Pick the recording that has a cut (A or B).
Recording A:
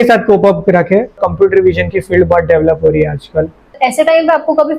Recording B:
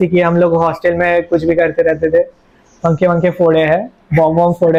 A